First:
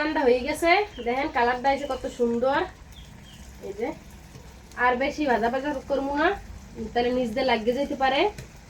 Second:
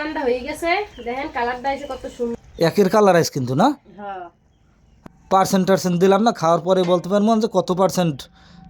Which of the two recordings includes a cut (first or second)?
second